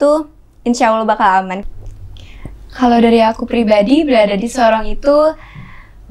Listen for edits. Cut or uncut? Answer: cut